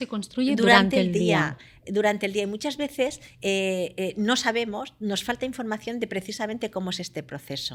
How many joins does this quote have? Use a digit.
0